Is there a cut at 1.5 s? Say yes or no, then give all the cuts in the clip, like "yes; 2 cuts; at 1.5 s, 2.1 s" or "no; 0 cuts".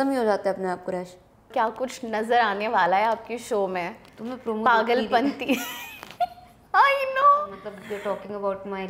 yes; 2 cuts; at 1.5 s, 7.7 s